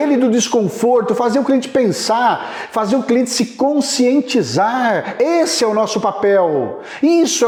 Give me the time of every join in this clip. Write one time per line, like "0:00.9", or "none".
none